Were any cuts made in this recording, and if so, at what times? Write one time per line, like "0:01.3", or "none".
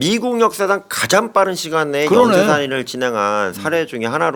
none

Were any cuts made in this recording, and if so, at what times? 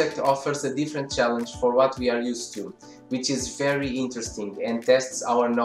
none

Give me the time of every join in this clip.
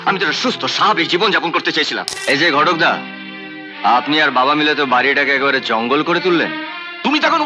0:02.1

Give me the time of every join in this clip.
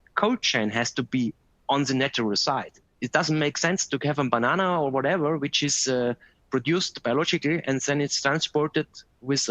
0:02.9

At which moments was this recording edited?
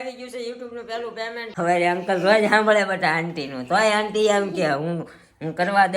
0:01.4

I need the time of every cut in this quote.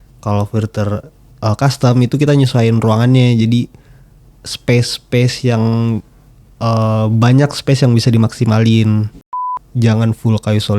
0:09.6

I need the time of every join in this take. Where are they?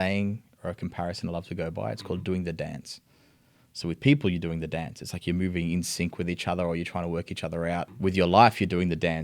0:07.9

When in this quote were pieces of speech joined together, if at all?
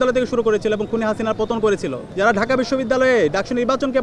0:02.0

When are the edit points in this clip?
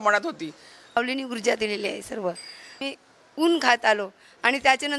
0:01.0
0:02.9

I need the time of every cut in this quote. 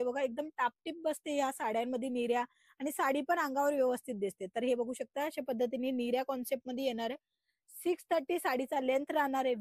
none

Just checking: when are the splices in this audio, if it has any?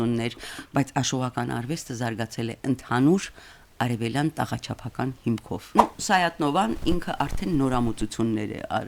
0:05.7

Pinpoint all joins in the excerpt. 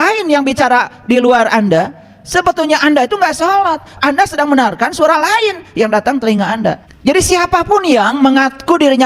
0:06.9

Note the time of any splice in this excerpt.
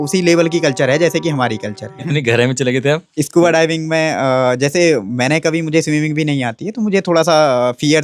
0:02.0
0:03.1

